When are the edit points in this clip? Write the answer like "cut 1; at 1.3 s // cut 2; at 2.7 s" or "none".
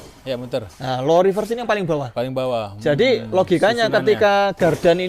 none